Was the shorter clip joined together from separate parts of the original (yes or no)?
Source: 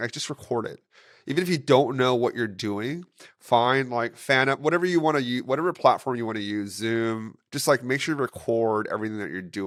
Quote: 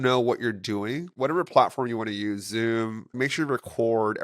yes